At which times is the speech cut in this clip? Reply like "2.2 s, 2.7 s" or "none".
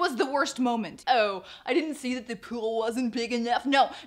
0.9 s